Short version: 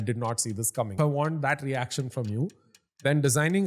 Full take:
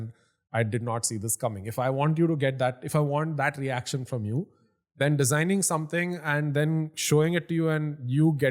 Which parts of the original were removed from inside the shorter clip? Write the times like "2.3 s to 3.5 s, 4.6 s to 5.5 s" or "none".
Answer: 1.6 s to 2.9 s